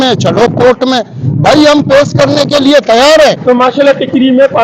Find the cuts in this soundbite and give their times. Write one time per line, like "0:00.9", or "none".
0:03.4

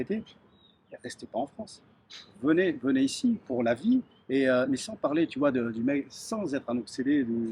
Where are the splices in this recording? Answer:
none

